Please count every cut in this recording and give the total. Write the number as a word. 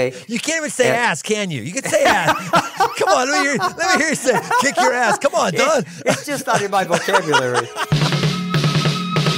one